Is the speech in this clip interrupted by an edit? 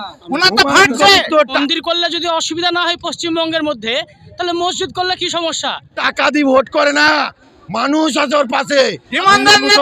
yes; 2 cuts; at 1.6 s, 6.0 s

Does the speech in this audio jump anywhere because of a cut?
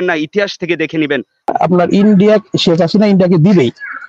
yes; 1 cut; at 1.5 s

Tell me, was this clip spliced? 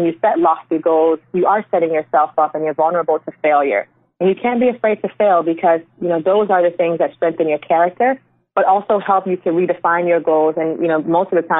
no; 0 cuts

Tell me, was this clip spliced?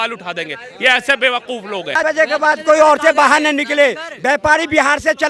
yes; 1 cut; at 2.0 s

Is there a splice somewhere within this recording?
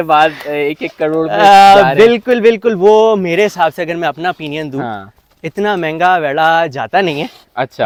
no; 0 cuts

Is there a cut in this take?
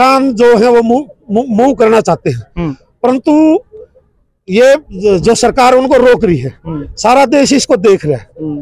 no; 0 cuts

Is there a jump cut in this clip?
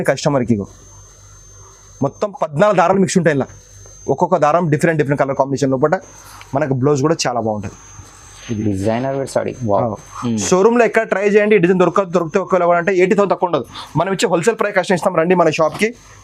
no; 0 cuts

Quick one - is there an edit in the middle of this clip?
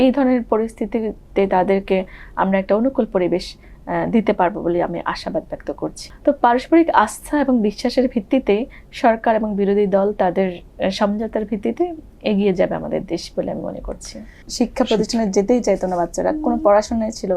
yes; 2 cuts; at 6.1 s, 14.4 s

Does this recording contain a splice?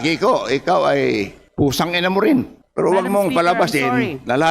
yes; 2 cuts; at 1.4 s, 2.6 s

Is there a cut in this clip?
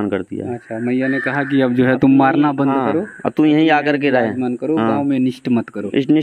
no; 0 cuts

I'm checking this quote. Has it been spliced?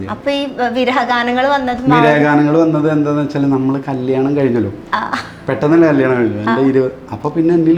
no; 0 cuts

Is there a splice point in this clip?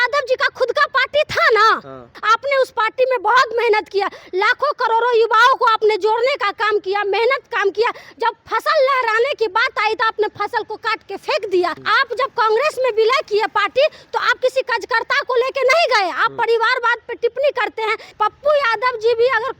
yes; 3 cuts; at 2.2 s, 11.8 s, 18.1 s

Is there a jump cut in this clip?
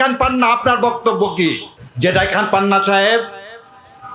yes; 1 cut; at 1.7 s

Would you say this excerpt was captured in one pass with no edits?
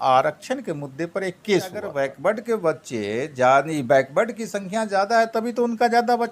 no; 1 cut; at 1.8 s

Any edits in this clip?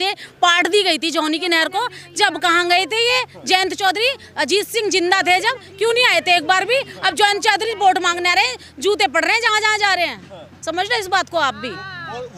no; 0 cuts

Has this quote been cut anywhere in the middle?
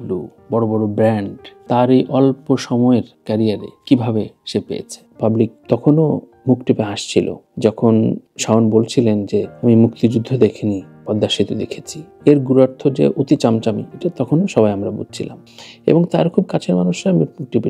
yes; 1 cut; at 5.1 s

